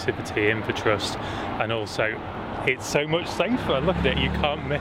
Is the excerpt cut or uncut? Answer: uncut